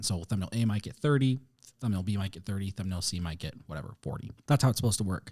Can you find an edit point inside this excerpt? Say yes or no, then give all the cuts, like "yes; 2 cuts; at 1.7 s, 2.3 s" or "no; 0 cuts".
yes; 1 cut; at 4.3 s